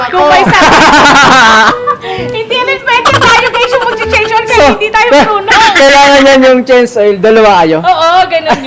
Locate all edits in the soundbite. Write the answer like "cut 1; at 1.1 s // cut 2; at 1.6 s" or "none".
none